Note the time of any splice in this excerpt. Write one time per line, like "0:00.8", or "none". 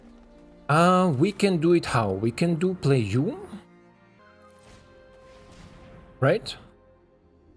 0:04.2